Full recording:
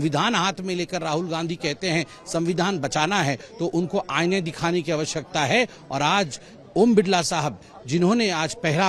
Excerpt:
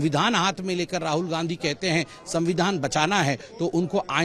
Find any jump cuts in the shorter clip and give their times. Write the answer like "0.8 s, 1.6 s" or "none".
none